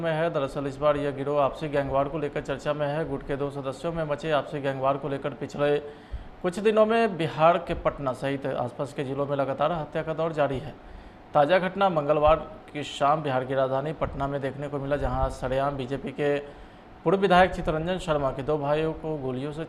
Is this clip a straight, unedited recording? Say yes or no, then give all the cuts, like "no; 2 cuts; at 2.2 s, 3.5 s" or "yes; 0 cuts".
yes; 0 cuts